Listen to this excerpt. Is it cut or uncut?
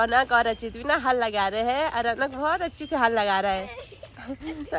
uncut